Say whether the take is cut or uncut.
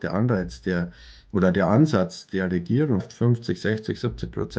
cut